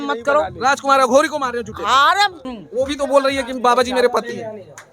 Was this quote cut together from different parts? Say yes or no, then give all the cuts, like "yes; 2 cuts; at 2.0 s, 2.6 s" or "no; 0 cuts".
yes; 1 cut; at 2.4 s